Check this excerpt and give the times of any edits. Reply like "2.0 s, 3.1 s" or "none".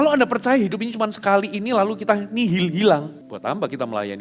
3.2 s